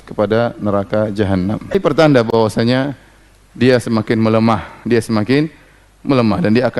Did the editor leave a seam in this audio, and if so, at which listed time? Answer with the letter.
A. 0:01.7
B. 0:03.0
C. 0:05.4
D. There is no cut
A